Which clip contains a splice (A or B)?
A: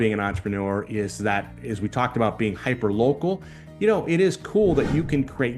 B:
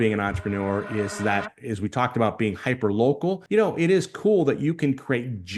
B